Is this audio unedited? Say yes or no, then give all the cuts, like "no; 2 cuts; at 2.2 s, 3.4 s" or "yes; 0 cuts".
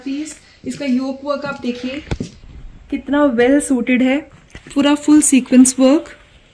yes; 0 cuts